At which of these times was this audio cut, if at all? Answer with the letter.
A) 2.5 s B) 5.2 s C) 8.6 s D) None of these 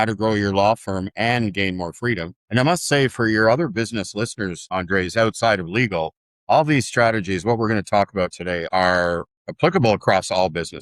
C